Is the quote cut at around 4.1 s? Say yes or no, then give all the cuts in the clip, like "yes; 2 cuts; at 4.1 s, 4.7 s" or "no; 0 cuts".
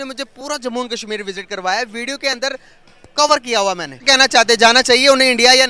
yes; 1 cut; at 4.1 s